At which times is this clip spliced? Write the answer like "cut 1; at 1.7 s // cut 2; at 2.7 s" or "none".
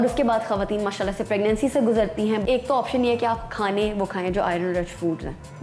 cut 1; at 2.4 s